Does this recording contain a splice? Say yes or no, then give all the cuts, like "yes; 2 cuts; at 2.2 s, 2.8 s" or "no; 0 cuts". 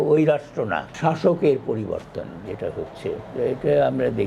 yes; 1 cut; at 0.9 s